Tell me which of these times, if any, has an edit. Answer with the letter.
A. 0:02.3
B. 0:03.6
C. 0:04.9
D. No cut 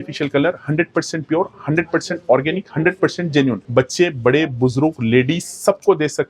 D